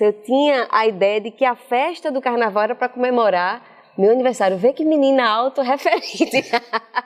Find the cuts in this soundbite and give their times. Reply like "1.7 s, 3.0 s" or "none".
none